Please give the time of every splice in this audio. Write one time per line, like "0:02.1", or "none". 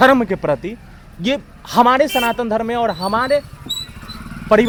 none